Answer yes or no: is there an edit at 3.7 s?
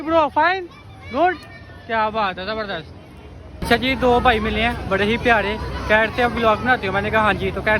yes